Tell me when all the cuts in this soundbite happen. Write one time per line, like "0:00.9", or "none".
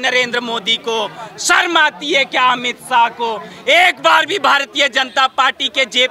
none